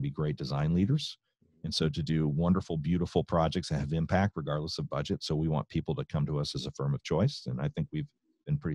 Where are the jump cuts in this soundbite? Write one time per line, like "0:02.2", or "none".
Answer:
none